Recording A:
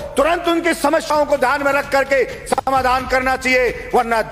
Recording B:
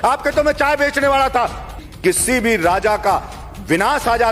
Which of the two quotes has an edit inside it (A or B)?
B